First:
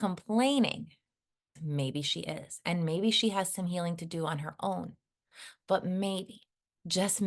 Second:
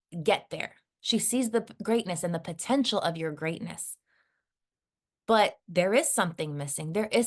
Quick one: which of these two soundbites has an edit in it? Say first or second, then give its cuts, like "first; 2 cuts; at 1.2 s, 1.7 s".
first; 1 cut; at 1.6 s